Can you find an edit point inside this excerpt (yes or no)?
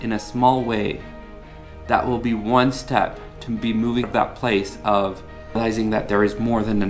yes